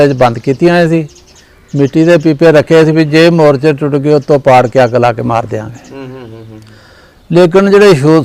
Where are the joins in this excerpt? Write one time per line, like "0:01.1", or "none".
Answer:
none